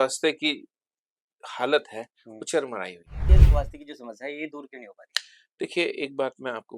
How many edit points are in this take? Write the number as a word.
one